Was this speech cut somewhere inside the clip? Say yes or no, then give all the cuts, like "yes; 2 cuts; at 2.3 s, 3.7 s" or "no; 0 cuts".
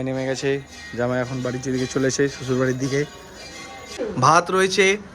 yes; 1 cut; at 4.0 s